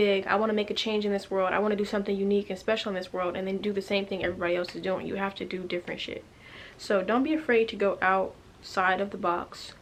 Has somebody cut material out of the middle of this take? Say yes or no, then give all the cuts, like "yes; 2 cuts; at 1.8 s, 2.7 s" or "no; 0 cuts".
no; 0 cuts